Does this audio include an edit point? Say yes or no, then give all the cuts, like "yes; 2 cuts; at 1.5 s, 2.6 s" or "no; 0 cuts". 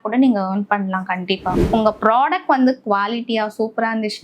yes; 1 cut; at 1.6 s